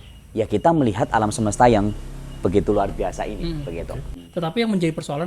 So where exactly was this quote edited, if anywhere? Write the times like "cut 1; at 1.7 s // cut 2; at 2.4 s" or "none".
cut 1; at 4.1 s